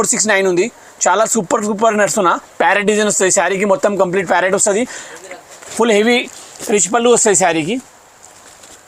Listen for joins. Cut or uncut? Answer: uncut